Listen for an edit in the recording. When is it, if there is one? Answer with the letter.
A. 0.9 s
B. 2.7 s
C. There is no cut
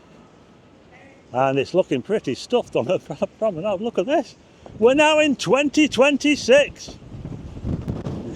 C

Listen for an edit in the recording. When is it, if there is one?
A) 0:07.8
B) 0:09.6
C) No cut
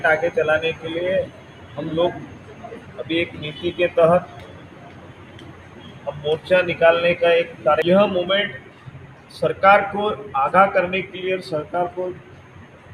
A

